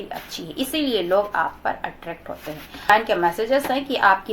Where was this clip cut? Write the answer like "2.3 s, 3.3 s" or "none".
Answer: 2.9 s